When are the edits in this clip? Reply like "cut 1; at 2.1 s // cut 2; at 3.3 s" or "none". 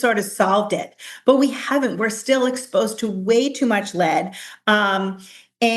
none

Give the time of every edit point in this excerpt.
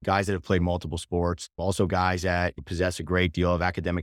none

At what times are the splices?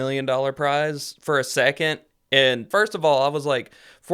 cut 1; at 2.6 s

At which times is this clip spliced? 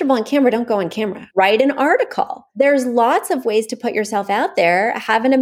cut 1; at 1.2 s // cut 2; at 2.4 s

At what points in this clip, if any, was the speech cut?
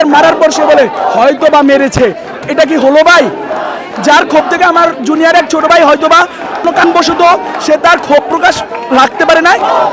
none

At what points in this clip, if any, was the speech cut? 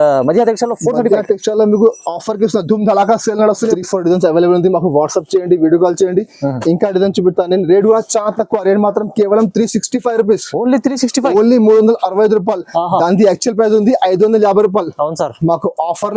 cut 1; at 3.7 s

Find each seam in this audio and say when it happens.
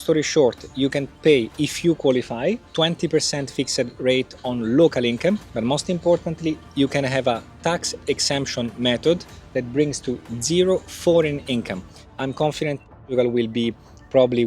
cut 1; at 1.2 s // cut 2; at 2.6 s // cut 3; at 5.5 s // cut 4; at 12.0 s

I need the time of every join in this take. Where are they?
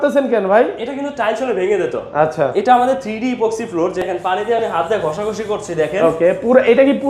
cut 1; at 4.0 s

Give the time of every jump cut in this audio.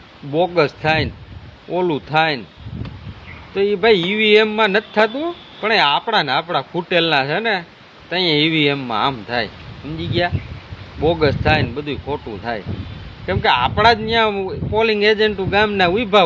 none

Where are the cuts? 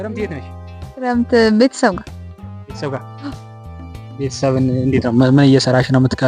none

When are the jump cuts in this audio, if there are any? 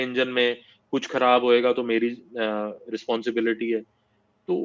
none

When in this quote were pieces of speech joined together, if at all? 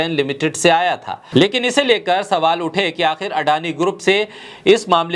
cut 1; at 1.2 s

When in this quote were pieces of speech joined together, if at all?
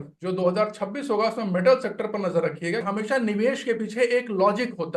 cut 1; at 2.8 s

